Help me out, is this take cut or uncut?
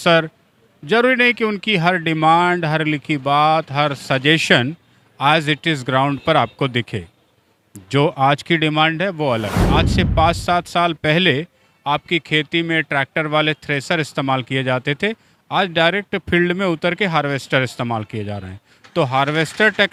uncut